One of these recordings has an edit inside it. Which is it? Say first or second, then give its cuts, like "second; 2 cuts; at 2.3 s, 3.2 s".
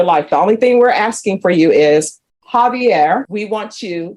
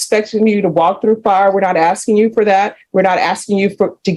first; 1 cut; at 3.3 s